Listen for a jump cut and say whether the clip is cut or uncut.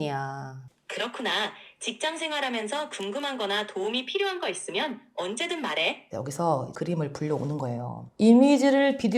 cut